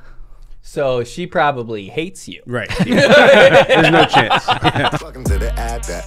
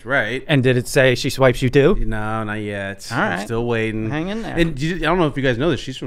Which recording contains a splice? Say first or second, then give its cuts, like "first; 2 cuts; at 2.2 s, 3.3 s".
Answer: first; 1 cut; at 5.0 s